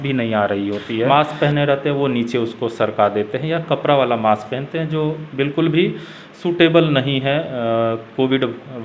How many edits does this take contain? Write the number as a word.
one